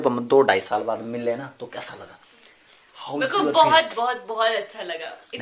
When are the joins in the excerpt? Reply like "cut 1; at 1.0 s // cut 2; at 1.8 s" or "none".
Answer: none